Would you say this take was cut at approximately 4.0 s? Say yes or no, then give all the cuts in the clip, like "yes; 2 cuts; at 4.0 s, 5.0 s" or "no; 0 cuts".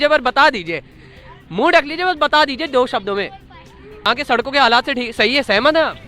yes; 1 cut; at 4.0 s